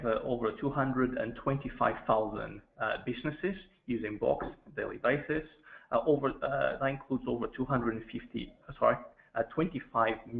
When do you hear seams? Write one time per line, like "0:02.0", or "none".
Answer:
0:08.6